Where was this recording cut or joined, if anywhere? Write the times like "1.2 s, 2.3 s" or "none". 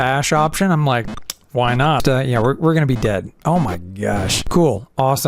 2.0 s, 4.4 s